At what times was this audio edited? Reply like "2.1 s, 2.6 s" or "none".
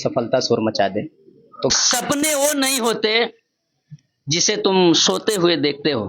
1.7 s